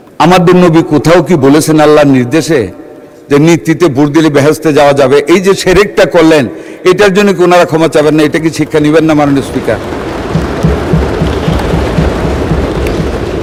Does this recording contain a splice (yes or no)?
no